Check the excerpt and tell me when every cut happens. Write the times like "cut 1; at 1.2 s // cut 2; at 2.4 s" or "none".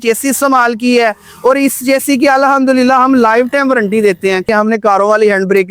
cut 1; at 4.5 s